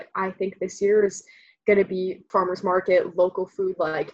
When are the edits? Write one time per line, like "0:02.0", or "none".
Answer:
0:02.2